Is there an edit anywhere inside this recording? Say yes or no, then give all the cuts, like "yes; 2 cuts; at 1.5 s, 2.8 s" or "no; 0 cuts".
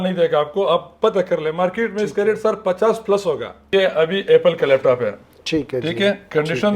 yes; 1 cut; at 3.6 s